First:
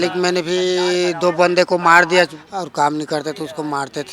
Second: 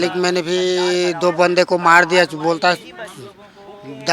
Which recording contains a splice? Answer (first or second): first